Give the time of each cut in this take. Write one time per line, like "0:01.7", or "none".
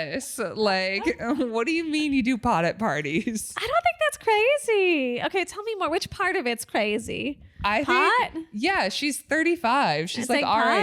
none

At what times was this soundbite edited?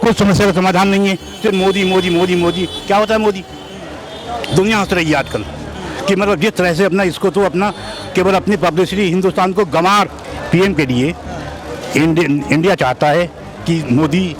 0:10.2

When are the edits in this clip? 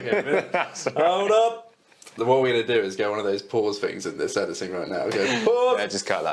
none

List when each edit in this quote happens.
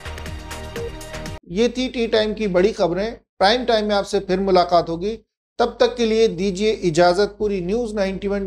none

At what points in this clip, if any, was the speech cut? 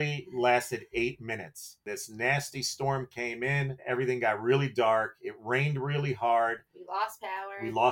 0:01.8
0:03.8

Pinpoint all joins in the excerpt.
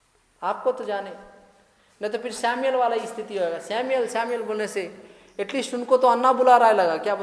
none

